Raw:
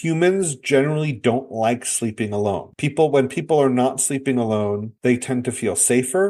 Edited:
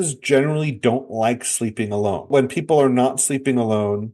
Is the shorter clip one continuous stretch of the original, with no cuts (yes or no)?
no